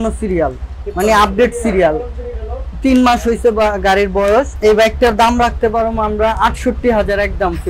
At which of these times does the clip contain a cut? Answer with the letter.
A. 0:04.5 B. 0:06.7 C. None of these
A